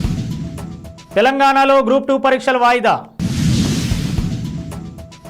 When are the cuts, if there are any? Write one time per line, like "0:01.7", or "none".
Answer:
0:00.9